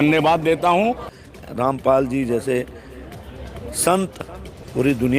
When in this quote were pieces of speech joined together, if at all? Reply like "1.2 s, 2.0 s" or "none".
1.1 s